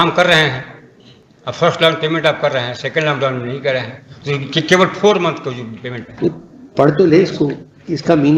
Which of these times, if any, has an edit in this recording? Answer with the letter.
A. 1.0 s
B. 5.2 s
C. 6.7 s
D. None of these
D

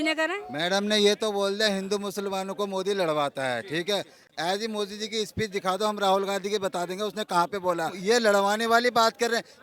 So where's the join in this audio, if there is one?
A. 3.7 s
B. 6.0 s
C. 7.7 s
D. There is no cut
D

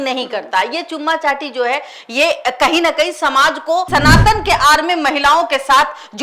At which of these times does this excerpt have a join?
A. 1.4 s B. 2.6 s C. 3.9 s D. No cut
C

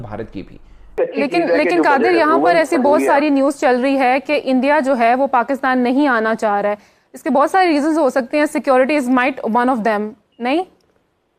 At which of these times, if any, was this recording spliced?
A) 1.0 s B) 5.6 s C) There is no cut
A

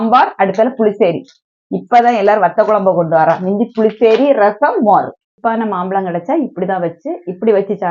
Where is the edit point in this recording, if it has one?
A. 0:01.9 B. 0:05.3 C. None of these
B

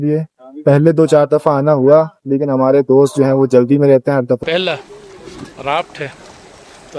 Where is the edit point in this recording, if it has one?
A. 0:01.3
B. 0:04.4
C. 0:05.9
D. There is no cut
B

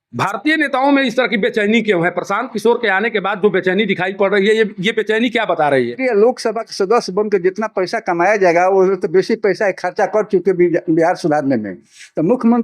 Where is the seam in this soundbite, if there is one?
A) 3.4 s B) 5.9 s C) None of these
B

